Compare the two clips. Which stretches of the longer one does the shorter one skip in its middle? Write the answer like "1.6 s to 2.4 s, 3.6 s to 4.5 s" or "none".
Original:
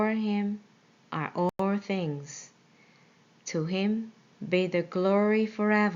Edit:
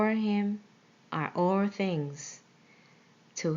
1.5 s to 1.6 s